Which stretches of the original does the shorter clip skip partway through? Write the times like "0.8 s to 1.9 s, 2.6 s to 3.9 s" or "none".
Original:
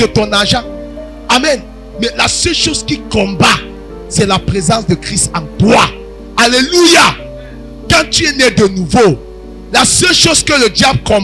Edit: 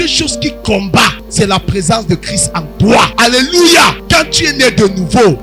3.7 s to 4.0 s, 5.9 s to 6.3 s, 7.2 s to 7.8 s